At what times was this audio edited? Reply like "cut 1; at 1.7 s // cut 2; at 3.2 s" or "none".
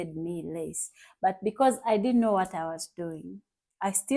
none